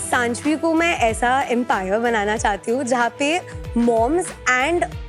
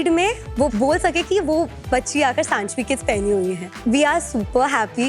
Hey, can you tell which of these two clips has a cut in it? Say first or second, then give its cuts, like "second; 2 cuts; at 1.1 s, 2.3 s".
second; 1 cut; at 3.7 s